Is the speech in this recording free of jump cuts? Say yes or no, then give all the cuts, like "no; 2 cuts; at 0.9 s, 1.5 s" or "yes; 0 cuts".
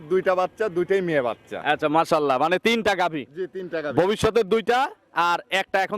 yes; 0 cuts